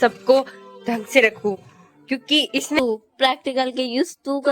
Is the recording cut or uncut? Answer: cut